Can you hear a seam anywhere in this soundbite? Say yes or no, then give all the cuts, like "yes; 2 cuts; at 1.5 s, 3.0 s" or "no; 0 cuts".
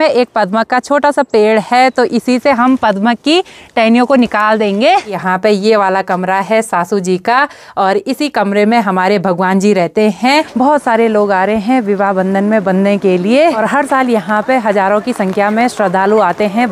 yes; 3 cuts; at 5.2 s, 10.5 s, 13.6 s